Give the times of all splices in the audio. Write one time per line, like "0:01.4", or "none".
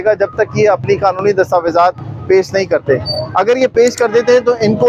none